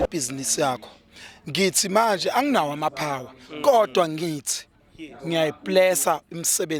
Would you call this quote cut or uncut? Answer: uncut